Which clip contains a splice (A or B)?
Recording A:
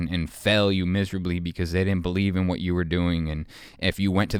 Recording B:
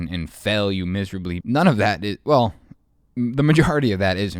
B